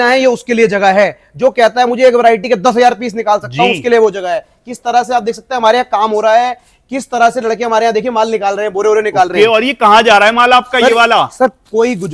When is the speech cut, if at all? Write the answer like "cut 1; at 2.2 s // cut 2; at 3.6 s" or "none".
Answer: none